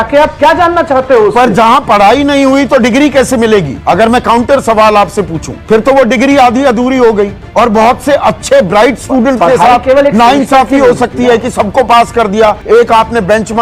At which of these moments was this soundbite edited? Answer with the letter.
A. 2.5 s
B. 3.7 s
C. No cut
B